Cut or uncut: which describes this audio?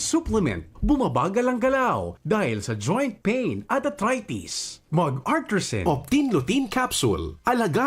cut